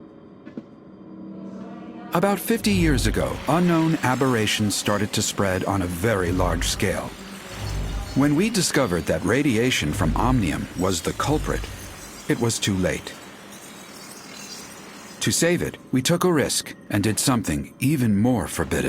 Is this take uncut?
no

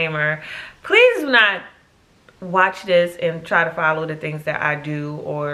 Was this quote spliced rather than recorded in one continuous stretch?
no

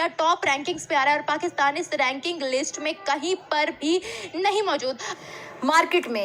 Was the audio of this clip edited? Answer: yes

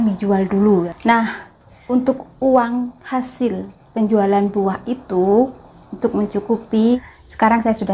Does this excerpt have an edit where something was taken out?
yes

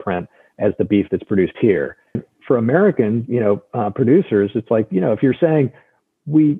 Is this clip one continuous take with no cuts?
no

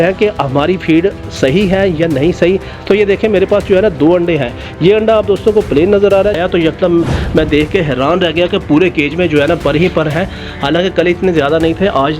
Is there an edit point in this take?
yes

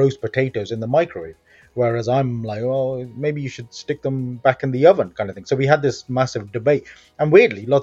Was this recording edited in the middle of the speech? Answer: no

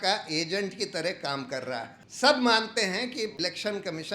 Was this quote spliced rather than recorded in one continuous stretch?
yes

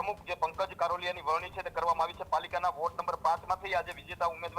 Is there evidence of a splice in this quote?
no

